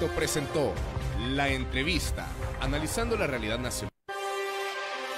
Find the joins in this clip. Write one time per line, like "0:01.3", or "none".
0:03.8